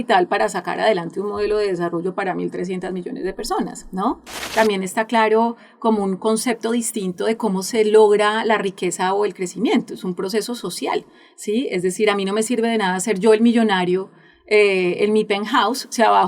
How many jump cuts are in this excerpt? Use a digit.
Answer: 1